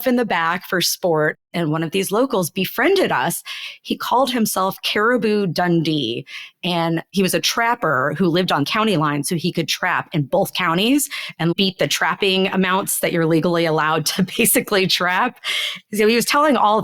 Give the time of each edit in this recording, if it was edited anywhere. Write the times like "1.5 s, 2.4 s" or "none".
1.5 s, 7.1 s